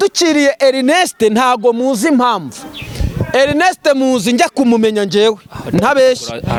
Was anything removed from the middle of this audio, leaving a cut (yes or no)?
no